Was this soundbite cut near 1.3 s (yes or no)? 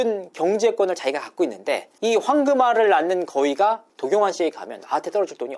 no